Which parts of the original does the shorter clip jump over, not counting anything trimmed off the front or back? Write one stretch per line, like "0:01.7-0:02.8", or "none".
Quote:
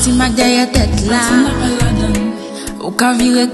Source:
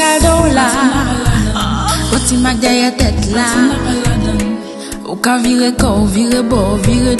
none